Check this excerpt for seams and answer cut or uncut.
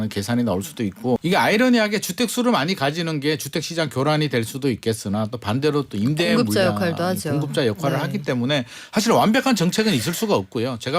cut